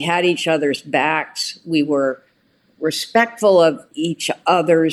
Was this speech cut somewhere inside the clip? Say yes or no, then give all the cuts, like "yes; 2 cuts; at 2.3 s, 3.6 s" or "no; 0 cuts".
yes; 1 cut; at 3.9 s